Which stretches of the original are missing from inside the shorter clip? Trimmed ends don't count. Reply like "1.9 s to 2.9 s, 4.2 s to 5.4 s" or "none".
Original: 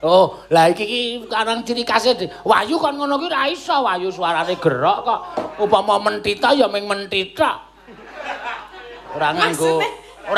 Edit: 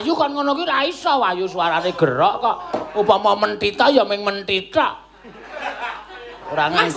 none